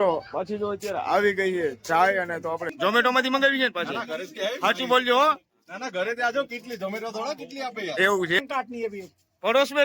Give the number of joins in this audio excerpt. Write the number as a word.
two